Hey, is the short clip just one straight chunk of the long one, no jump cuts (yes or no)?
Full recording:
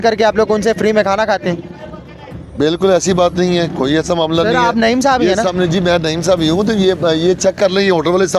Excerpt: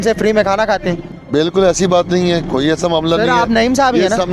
no